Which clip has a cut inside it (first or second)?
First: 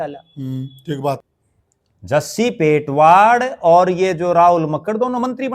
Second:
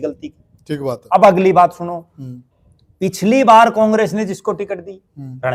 first